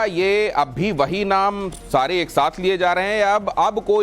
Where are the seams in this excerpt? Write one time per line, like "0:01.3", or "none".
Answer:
0:01.4